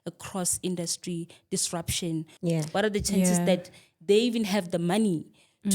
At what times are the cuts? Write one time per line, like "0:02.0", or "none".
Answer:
0:02.3